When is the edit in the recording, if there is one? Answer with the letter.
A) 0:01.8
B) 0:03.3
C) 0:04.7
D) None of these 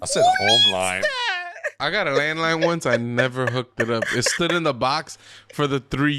A